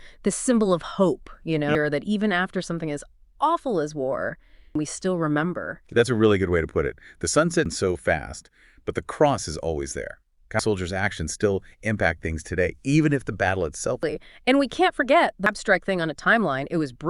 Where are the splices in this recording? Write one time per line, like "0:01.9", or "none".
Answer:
0:01.7
0:04.7
0:07.7
0:10.6
0:14.1
0:15.5